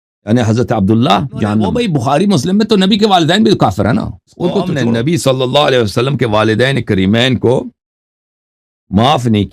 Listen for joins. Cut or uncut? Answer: cut